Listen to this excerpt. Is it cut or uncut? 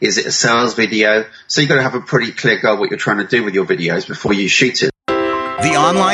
cut